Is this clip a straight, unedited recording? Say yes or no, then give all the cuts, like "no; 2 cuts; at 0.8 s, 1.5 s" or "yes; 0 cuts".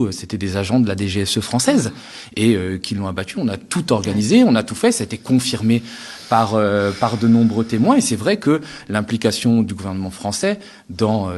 yes; 0 cuts